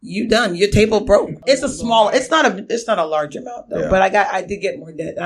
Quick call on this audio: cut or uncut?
cut